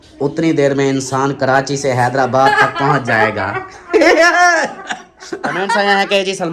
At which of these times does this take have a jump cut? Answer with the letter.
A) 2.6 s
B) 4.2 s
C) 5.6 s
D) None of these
C